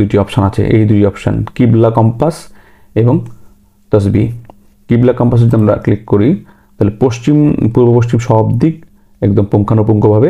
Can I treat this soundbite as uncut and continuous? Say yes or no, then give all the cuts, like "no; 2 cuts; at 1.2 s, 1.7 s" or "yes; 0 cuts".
yes; 0 cuts